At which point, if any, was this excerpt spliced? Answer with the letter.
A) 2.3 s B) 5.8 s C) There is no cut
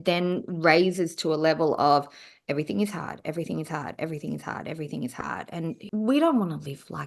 B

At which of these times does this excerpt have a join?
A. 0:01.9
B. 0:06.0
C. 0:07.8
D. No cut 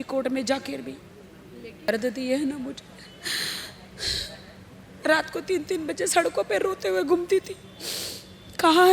A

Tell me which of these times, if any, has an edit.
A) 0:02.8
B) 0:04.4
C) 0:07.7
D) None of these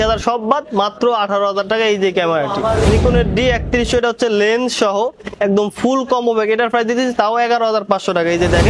A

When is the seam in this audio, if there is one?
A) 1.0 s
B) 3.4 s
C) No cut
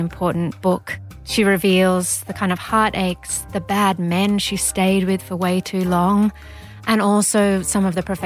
A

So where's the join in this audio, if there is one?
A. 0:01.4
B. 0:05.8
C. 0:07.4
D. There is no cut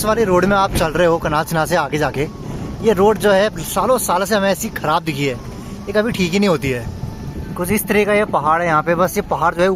D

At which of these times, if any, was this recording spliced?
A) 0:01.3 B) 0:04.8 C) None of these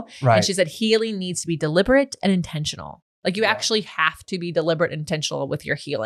C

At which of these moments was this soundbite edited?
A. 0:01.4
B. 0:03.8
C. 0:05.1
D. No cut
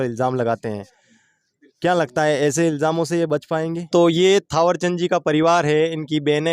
B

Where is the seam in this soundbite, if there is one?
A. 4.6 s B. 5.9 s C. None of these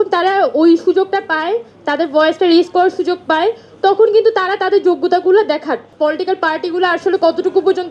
B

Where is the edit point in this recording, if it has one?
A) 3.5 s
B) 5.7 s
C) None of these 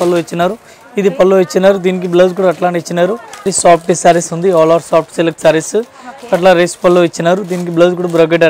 A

